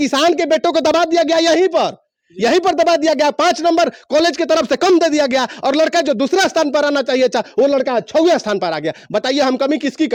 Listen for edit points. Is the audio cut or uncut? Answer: uncut